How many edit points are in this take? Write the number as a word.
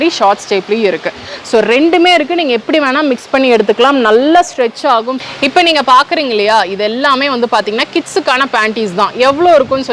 one